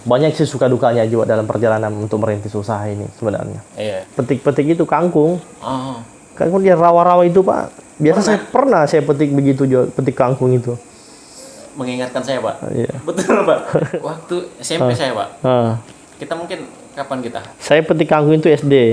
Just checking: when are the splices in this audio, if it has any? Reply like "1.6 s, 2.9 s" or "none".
4.0 s, 13.9 s